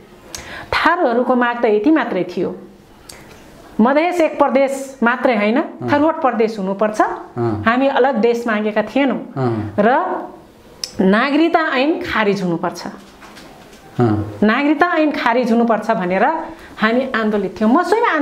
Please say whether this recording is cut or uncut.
uncut